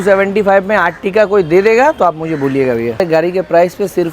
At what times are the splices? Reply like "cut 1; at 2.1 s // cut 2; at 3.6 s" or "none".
cut 1; at 3.0 s